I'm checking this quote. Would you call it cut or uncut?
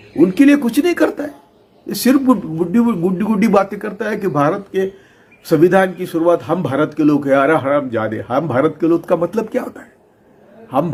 uncut